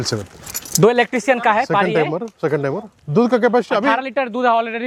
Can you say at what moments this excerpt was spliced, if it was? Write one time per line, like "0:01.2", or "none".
none